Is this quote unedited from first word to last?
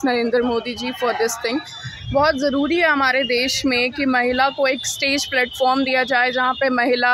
yes; 0 cuts

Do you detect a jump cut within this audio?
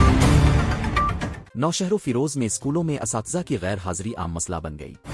yes; 1 cut; at 1.3 s

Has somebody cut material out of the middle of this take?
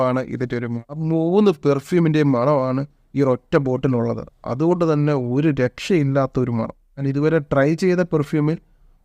yes; 2 cuts; at 1.0 s, 7.1 s

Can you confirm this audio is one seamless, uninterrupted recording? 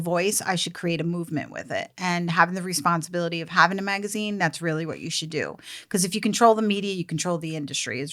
yes; 0 cuts

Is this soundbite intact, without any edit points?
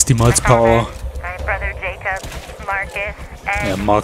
yes; 0 cuts

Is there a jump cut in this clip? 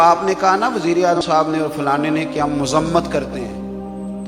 yes; 1 cut; at 1.2 s

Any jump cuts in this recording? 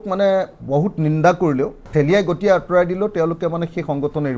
yes; 1 cut; at 1.9 s

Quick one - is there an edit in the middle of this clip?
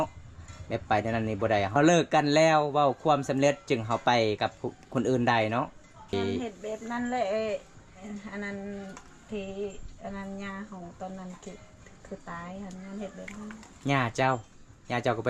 yes; 2 cuts; at 1.8 s, 6.1 s

